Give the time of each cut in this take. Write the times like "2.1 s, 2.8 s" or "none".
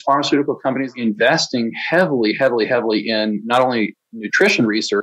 0.9 s